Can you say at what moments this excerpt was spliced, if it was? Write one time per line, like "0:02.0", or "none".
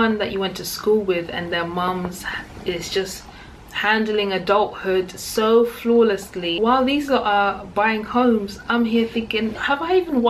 none

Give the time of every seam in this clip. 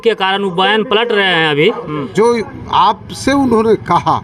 0:02.0

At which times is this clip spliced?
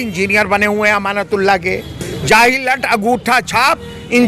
none

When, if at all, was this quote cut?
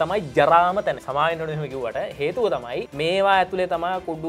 0:01.0
0:02.9

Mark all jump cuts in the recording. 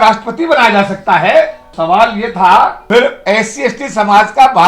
0:01.7
0:02.8

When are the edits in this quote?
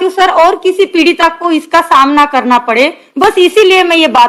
none

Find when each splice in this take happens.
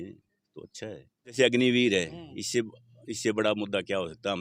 0:01.3

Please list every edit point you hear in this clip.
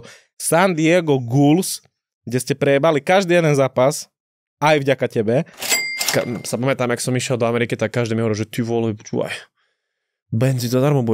0:05.7

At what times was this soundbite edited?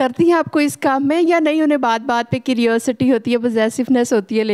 none

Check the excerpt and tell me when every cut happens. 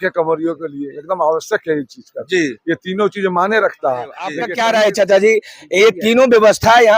0:04.4

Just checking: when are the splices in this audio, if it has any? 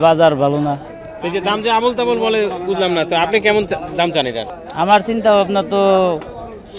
0:01.1
0:04.5

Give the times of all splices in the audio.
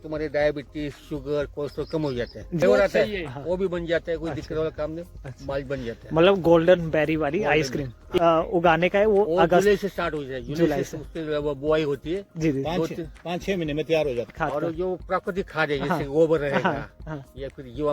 0:02.6
0:08.2
0:14.4

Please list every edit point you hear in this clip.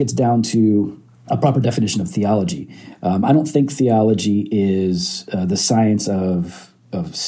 0:01.1

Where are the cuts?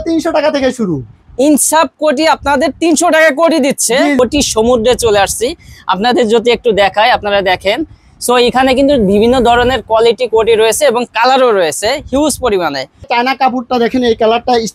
0:04.2
0:13.1

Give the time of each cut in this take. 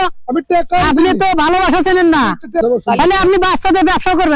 0:02.9

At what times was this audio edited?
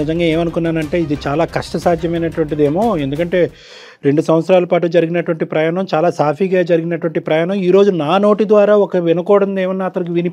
none

